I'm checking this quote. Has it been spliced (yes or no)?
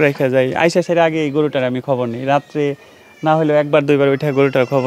no